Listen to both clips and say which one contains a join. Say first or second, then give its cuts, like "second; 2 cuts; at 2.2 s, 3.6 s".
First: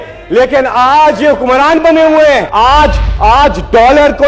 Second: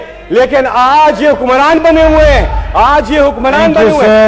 first; 1 cut; at 2.5 s